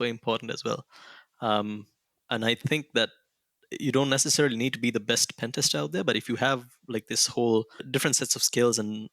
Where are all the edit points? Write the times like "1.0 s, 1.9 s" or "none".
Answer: 7.9 s